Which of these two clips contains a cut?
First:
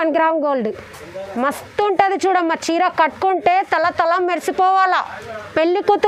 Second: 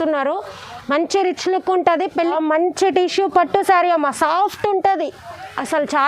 second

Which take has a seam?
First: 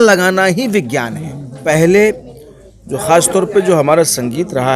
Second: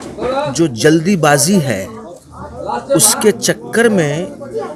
first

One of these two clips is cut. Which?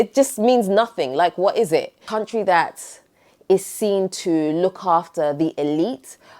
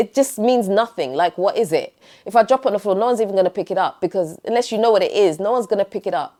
first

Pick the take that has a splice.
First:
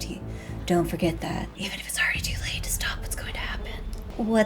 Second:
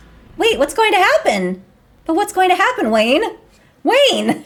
first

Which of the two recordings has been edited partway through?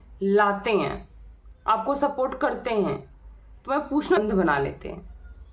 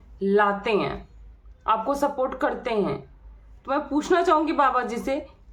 first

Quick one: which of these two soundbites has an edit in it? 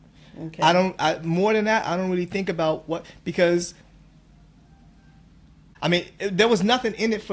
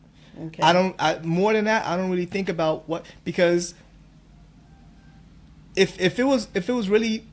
first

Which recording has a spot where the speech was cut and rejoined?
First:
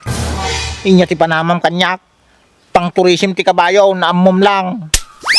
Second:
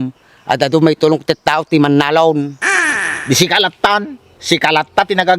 second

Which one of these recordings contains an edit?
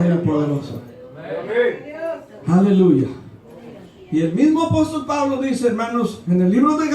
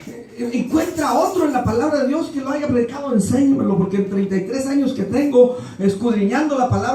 first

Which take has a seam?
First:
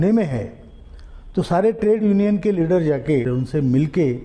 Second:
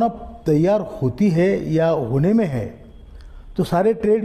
first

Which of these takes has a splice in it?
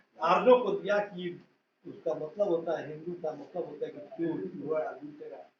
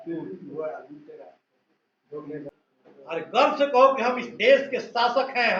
second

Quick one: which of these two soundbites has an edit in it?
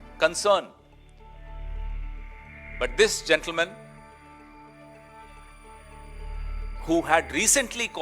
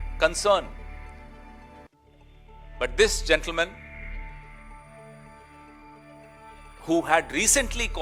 first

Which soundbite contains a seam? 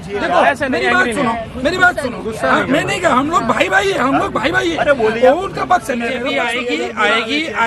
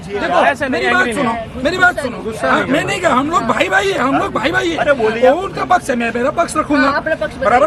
first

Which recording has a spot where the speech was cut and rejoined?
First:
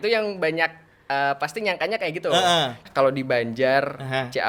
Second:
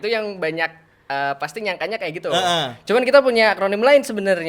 first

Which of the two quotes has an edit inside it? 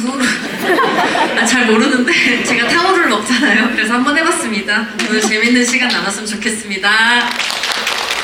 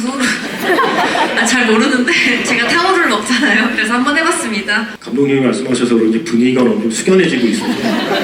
second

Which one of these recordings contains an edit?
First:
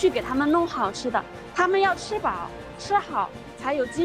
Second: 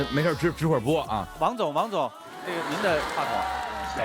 second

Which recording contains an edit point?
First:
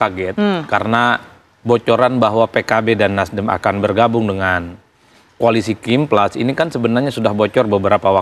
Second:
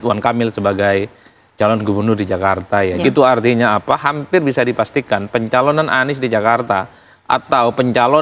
second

